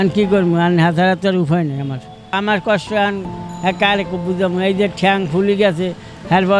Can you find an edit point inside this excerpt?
yes; 1 cut; at 2.1 s

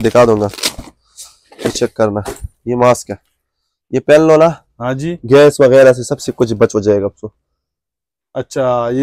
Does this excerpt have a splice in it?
no; 0 cuts

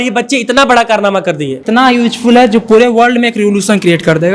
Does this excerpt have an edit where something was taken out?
yes; 1 cut; at 1.6 s

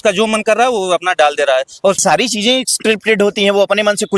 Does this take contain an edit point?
yes; 1 cut; at 2.0 s

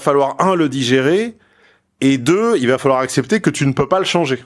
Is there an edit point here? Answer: no; 0 cuts

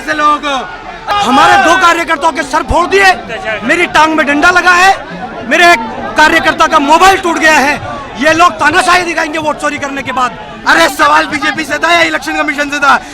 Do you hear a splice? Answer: yes; 2 cuts; at 0.9 s, 10.6 s

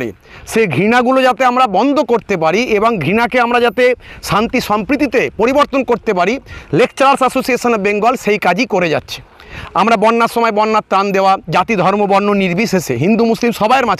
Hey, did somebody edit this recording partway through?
no; 0 cuts

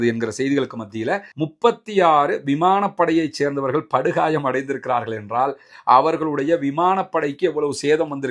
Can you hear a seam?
yes; 1 cut; at 1.4 s

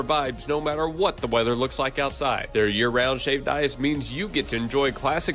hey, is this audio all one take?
yes; 0 cuts

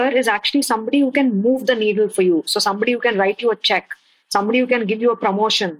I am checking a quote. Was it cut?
no; 0 cuts

